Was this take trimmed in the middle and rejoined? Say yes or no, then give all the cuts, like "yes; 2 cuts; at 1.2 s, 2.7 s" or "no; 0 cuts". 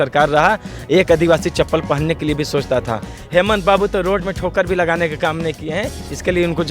yes; 1 cut; at 3.1 s